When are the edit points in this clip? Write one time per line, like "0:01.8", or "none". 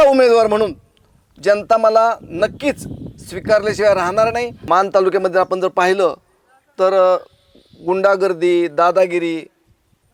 0:04.5